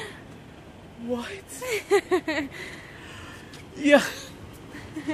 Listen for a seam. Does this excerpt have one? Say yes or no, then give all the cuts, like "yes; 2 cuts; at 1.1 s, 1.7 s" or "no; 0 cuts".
no; 0 cuts